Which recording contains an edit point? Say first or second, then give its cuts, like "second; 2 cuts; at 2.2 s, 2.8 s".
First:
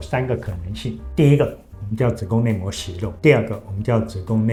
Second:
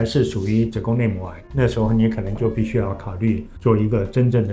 second; 2 cuts; at 1.5 s, 3.5 s